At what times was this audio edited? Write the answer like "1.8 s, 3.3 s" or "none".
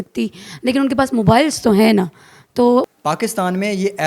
2.8 s